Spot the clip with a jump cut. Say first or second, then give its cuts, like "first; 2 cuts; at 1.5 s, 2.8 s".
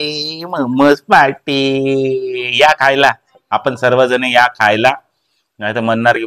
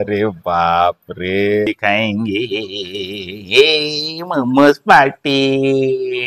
second; 1 cut; at 1.7 s